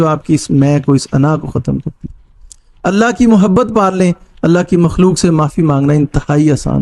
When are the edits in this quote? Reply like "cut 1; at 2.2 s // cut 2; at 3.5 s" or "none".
none